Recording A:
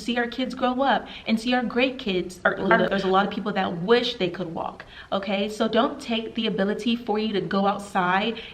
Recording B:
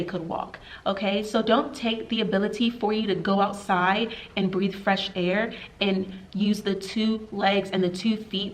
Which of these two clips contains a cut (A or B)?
A